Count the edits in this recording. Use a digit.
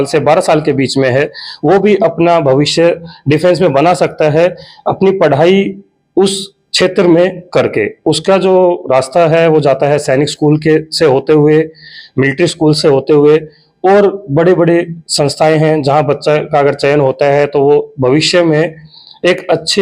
0